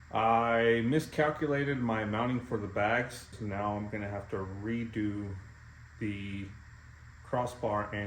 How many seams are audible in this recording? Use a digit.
1